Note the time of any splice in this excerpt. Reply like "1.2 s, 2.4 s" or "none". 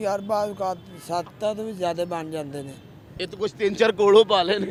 none